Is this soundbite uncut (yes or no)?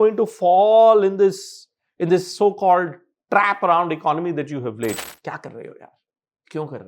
no